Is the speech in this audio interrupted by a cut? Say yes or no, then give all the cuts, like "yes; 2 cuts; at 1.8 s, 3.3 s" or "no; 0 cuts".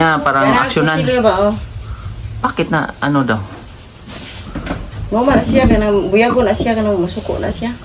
no; 0 cuts